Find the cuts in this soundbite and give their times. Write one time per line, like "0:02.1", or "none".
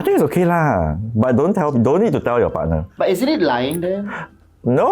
none